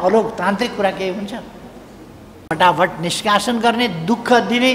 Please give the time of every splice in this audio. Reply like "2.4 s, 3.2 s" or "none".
none